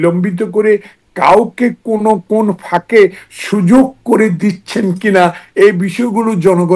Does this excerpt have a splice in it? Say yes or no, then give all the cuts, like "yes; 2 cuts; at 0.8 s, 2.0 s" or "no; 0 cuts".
no; 0 cuts